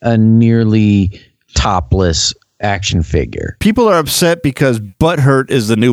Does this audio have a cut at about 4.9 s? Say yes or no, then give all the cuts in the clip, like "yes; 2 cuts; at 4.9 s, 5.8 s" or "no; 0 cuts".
yes; 1 cut; at 4.9 s